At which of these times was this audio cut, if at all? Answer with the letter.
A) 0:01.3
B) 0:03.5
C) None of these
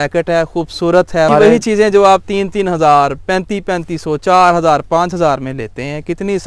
A